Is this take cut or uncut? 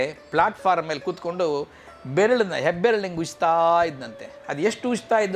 uncut